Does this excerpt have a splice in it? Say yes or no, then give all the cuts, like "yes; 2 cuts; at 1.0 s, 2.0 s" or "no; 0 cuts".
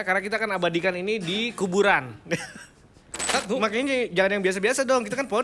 yes; 1 cut; at 3.3 s